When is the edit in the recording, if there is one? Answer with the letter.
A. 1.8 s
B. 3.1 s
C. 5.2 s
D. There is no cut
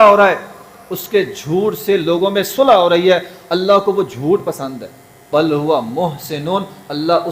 C